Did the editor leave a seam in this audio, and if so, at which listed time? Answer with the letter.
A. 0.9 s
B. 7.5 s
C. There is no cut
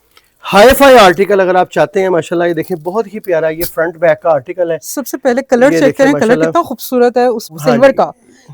B